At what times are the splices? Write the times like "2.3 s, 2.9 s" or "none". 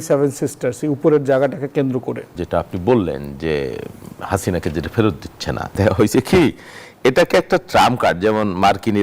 2.3 s, 5.7 s